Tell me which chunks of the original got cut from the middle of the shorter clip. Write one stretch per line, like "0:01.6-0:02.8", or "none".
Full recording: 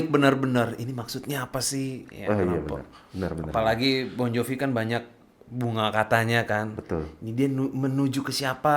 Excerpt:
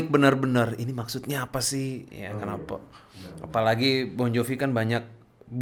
none